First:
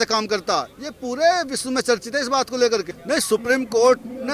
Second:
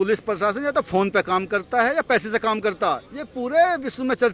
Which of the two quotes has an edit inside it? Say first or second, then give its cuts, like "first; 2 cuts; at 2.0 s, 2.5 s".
first; 1 cut; at 2.9 s